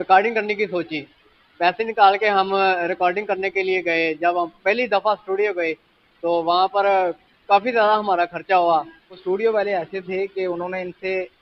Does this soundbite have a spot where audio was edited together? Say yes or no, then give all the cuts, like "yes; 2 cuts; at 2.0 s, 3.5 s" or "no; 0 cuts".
yes; 1 cut; at 9.2 s